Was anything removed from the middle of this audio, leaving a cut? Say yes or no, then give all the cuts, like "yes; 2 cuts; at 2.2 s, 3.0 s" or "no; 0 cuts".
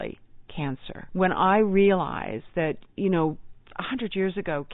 yes; 1 cut; at 1.0 s